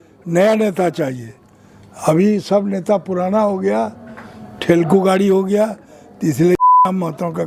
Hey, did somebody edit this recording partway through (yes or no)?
no